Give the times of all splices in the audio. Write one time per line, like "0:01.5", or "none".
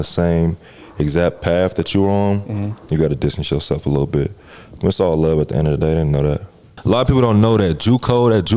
0:06.7